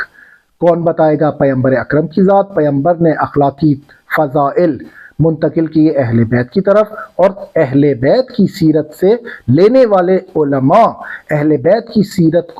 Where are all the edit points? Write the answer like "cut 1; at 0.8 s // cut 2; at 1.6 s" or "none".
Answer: none